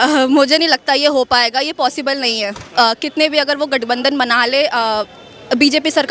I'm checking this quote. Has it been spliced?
no; 0 cuts

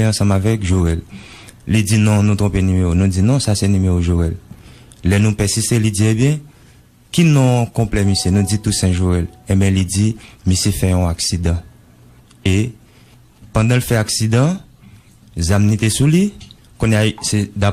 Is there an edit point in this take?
no; 0 cuts

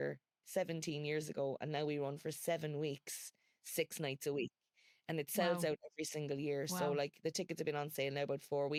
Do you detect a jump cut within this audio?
no; 0 cuts

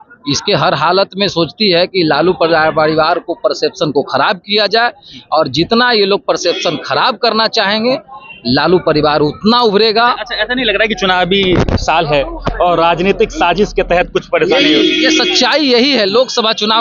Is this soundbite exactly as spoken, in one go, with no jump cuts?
yes; 0 cuts

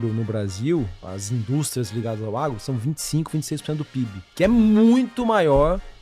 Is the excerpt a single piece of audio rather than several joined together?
no; 2 cuts; at 1.0 s, 4.2 s

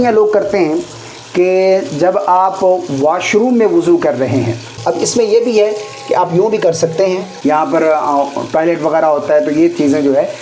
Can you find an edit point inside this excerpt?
yes; 2 cuts; at 4.7 s, 7.3 s

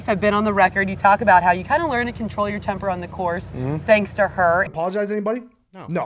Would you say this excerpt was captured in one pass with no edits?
no; 1 cut; at 4.7 s

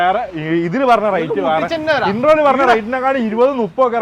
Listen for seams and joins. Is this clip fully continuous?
yes; 0 cuts

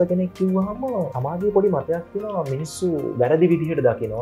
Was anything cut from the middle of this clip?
yes; 1 cut; at 1.2 s

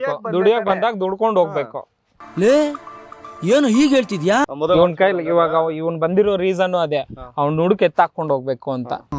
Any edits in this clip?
yes; 1 cut; at 4.5 s

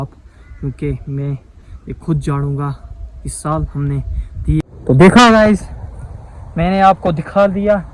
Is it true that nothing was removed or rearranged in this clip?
no; 1 cut; at 4.7 s

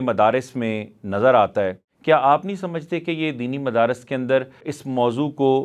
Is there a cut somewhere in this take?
yes; 2 cuts; at 1.9 s, 4.7 s

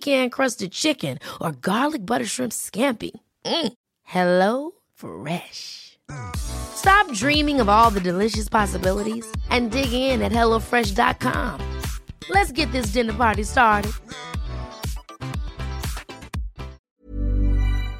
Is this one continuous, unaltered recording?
no; 1 cut; at 16.8 s

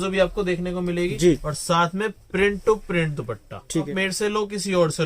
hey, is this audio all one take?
no; 2 cuts; at 1.5 s, 3.9 s

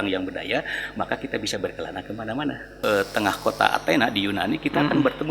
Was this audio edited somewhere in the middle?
yes; 1 cut; at 2.7 s

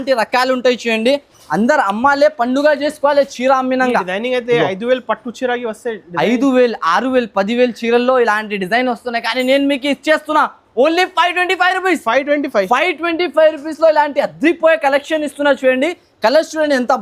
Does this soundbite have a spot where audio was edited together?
no; 0 cuts

